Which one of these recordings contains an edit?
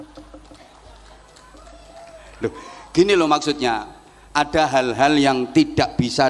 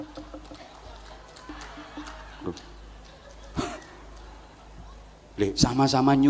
second; 1 cut; at 1.5 s

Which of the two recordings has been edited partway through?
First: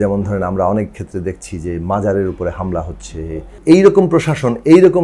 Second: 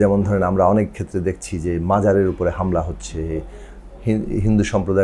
first; 1 cut; at 3.5 s

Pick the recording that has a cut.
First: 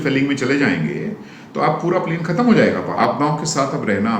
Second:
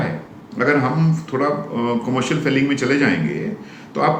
first; 1 cut; at 2.9 s

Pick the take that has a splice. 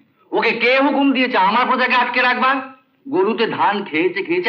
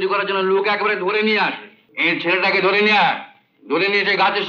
second; 1 cut; at 1.9 s

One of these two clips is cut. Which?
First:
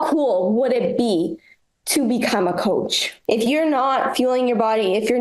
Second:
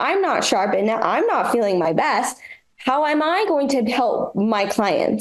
first; 1 cut; at 3.1 s

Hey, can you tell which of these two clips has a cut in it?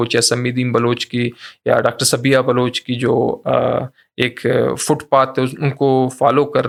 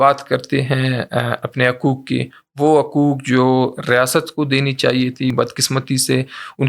second; 1 cut; at 5.3 s

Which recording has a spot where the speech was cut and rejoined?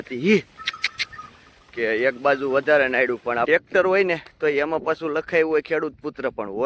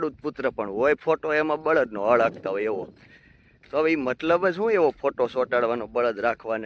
first; 1 cut; at 3.5 s

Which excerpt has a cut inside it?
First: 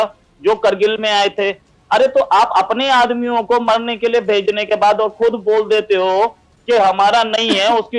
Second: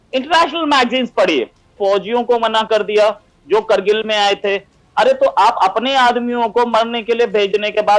second; 1 cut; at 1.7 s

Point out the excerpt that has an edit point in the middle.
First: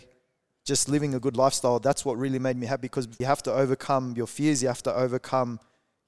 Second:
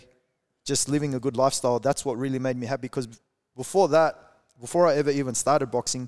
first; 1 cut; at 3.2 s

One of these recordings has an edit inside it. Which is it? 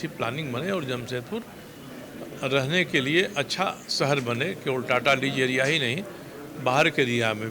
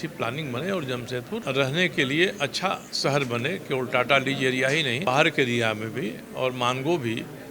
second; 2 cuts; at 1.4 s, 5.0 s

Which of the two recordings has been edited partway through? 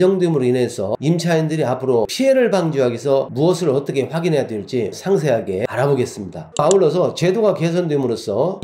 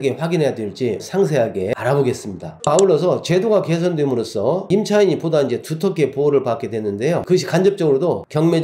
first; 1 cut; at 2.1 s

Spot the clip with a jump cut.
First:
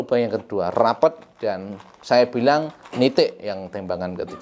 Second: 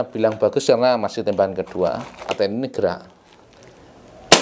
second; 1 cut; at 2.3 s

